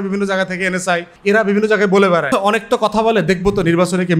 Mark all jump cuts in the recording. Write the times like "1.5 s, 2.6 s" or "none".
1.1 s, 2.3 s